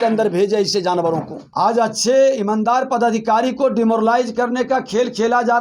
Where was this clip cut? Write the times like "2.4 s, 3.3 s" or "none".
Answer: 1.4 s